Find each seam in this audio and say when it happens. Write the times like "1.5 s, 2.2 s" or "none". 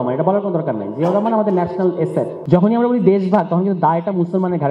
2.4 s